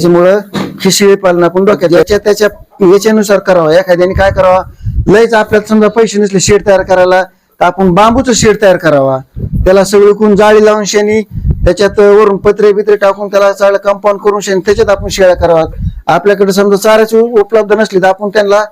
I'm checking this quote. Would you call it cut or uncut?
cut